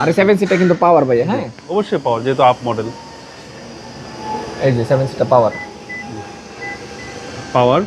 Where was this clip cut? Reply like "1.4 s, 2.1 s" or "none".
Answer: none